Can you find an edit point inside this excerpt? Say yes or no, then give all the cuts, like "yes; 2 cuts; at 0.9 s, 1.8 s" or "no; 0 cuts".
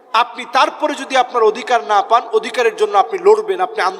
no; 0 cuts